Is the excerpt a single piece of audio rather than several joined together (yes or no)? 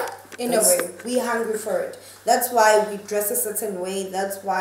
no